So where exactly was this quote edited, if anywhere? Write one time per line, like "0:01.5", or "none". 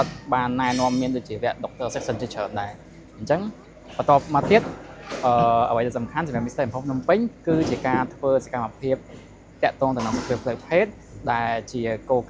none

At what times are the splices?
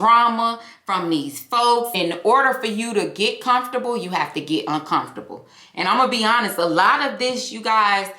0:01.9

